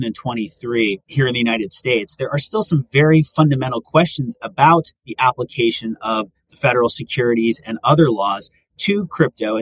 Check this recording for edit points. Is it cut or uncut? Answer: cut